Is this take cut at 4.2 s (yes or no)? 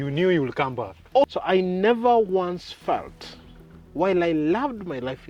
no